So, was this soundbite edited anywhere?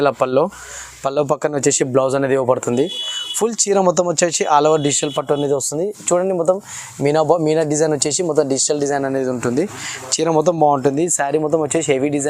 no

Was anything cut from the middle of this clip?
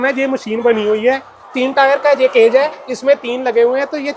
yes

